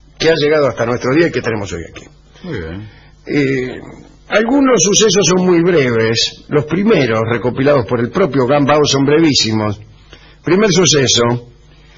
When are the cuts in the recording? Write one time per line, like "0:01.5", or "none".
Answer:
0:06.2